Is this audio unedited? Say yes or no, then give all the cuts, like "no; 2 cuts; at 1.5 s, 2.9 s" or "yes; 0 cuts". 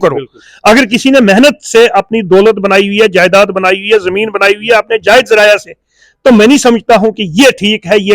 yes; 0 cuts